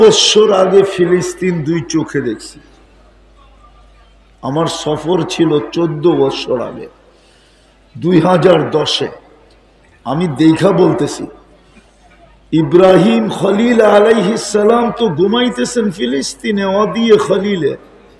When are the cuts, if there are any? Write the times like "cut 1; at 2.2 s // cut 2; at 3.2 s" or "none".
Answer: none

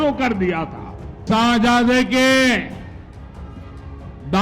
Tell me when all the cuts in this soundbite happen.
cut 1; at 1.2 s

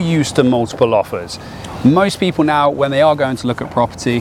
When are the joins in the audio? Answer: none

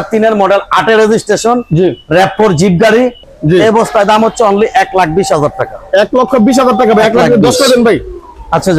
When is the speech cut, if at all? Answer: cut 1; at 3.3 s

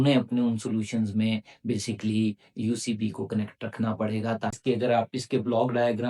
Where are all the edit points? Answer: cut 1; at 4.5 s

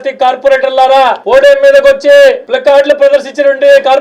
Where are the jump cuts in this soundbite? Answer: cut 1; at 1.2 s // cut 2; at 2.5 s

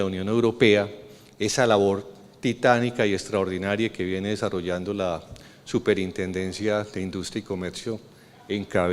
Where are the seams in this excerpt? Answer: cut 1; at 7.3 s

